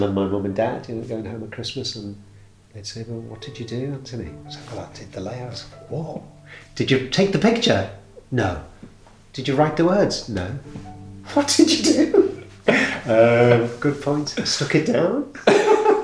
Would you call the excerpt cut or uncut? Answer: uncut